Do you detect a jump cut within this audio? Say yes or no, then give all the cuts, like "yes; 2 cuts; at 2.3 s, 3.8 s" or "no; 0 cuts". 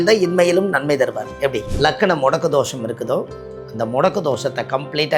yes; 1 cut; at 1.7 s